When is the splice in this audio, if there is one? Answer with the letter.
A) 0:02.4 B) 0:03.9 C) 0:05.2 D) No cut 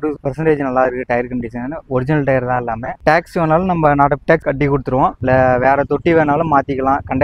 C